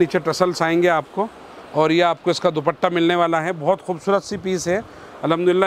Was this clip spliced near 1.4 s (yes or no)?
no